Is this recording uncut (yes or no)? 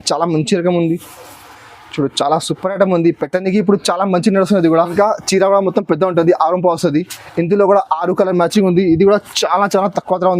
no